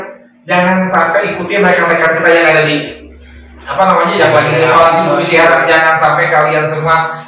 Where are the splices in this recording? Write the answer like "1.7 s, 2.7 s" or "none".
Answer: none